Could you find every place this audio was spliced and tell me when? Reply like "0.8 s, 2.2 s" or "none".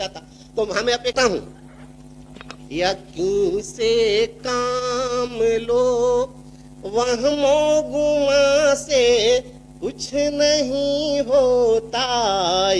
1.1 s

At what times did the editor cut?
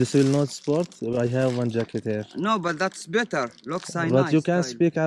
none

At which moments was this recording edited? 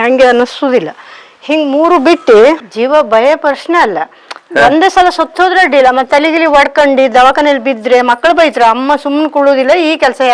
2.7 s

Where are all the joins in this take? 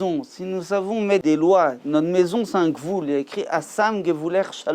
1.2 s

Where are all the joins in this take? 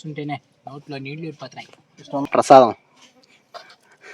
2.3 s

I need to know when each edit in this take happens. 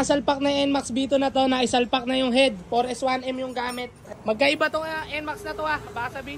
4.0 s

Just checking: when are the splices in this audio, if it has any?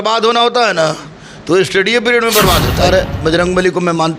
2.8 s

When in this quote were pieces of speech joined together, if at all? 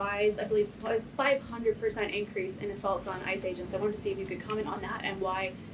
none

